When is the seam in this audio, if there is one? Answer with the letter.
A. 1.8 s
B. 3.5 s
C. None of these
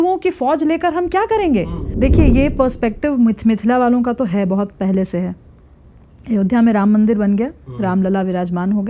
A